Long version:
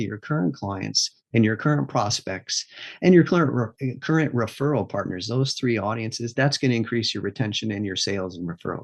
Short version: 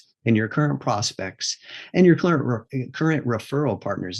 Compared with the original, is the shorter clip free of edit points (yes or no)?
yes